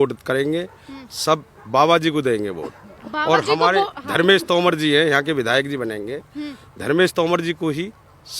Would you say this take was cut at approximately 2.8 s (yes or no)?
no